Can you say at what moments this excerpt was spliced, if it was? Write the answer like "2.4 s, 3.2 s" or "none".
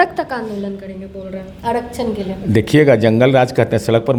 none